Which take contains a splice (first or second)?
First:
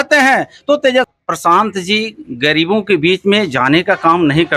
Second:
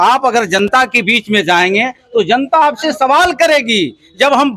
first